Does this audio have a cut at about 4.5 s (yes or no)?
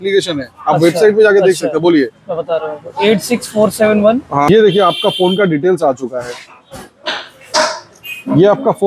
yes